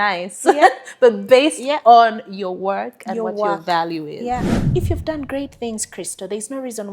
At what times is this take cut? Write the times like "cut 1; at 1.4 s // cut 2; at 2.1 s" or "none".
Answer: cut 1; at 4.6 s